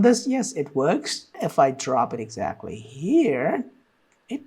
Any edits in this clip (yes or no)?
yes